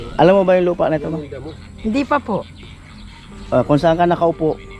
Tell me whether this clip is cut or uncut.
uncut